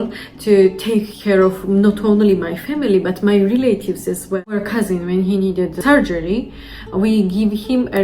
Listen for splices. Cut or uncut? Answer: cut